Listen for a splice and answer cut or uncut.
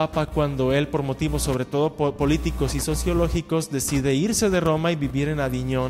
uncut